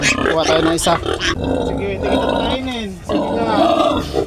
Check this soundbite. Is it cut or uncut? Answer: cut